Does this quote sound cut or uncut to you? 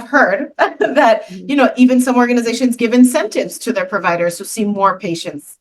uncut